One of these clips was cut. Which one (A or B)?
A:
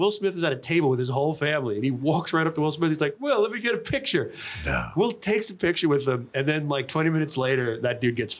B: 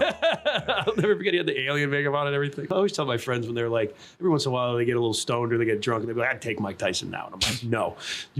B